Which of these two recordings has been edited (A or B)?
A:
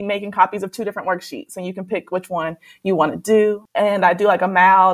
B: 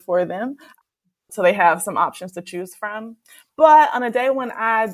A